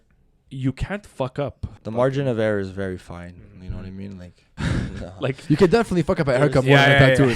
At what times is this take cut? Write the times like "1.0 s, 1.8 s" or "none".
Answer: 1.7 s, 4.5 s